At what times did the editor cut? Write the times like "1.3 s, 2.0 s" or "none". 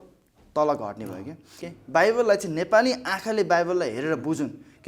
1.6 s